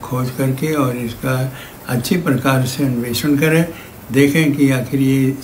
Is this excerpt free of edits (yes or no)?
yes